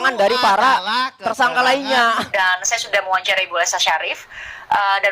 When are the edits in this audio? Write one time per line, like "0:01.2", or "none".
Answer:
0:02.3

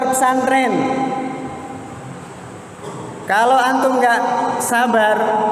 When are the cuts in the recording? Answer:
none

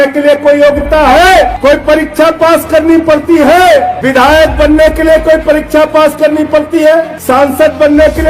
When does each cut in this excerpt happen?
0:01.5
0:04.0
0:07.2

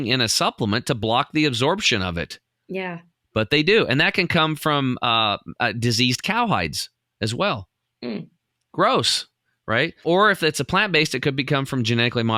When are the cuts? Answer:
none

